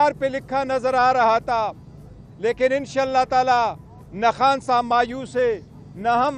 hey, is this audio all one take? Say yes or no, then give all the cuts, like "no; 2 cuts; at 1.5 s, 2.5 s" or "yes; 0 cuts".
yes; 0 cuts